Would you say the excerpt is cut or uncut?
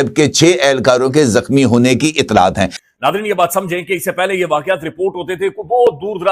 cut